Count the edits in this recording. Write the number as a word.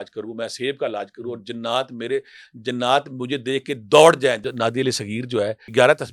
one